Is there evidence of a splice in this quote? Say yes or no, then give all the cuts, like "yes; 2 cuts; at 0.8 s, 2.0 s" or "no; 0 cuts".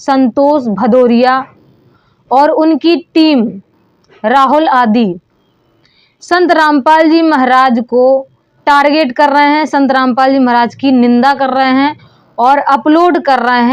no; 0 cuts